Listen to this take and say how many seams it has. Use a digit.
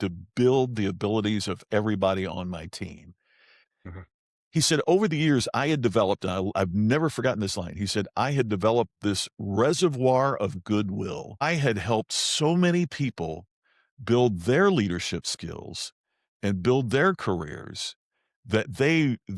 2